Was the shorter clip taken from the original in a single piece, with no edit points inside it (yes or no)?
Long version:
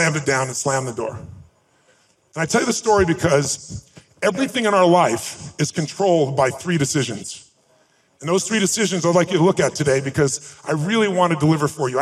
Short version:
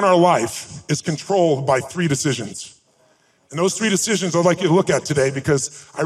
yes